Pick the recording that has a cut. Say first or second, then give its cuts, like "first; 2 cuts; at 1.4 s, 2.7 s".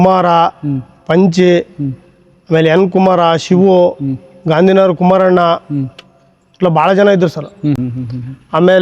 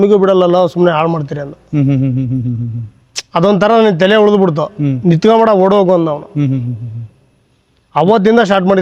first; 1 cut; at 7.8 s